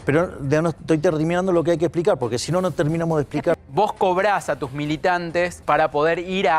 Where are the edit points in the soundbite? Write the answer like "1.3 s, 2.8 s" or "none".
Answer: 3.6 s, 5.6 s